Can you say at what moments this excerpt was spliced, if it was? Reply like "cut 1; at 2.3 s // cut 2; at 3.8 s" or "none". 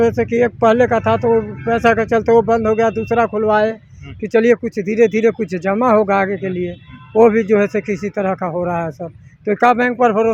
none